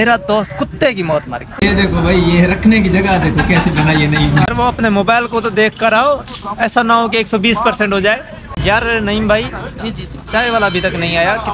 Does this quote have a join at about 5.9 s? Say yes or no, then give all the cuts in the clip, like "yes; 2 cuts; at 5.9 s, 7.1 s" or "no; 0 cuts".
no; 3 cuts; at 1.4 s, 4.5 s, 8.6 s